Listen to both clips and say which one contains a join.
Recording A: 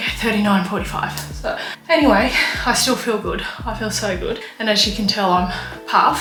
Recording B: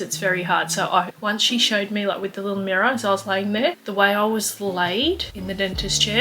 B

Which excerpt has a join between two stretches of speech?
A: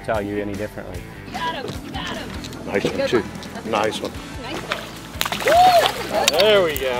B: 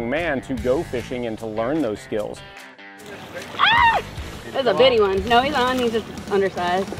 B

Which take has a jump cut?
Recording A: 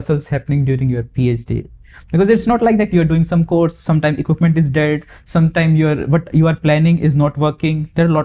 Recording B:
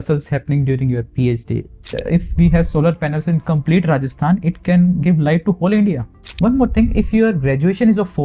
B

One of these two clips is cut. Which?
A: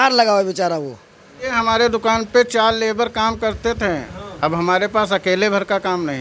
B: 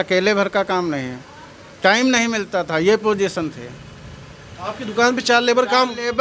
A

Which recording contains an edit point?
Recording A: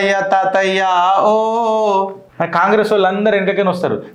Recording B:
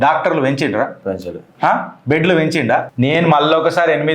B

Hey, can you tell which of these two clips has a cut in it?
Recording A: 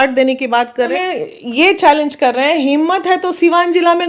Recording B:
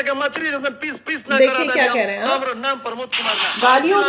A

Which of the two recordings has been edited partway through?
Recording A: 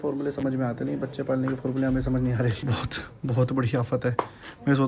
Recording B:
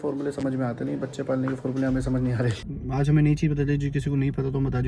B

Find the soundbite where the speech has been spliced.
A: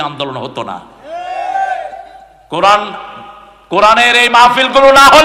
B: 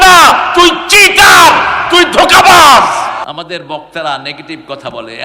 B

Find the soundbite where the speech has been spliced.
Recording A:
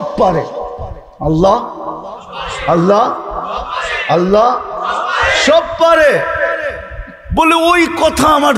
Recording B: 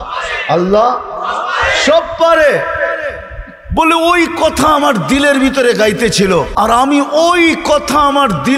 B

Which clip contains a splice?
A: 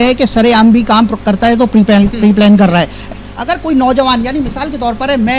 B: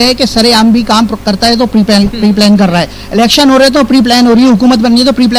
A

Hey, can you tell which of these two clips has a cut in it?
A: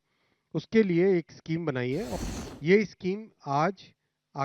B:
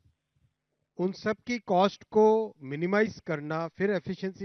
A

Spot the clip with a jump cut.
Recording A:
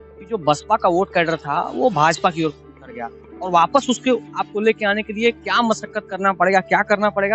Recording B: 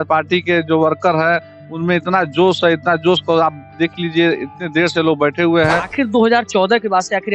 B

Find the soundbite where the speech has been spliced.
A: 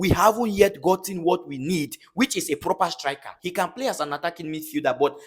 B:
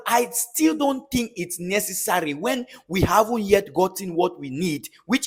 A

